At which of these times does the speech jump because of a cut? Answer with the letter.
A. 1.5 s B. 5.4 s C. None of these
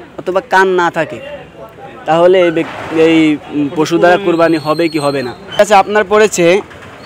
B